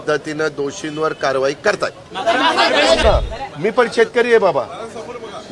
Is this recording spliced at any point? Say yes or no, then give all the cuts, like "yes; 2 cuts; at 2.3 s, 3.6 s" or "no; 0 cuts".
yes; 1 cut; at 3.0 s